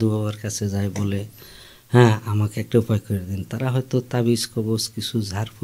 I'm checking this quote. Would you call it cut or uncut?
uncut